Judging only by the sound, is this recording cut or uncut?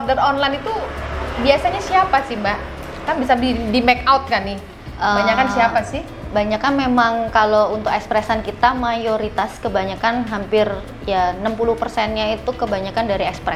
uncut